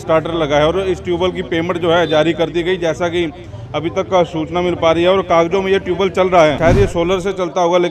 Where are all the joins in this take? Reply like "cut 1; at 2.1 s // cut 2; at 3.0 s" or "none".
cut 1; at 6.6 s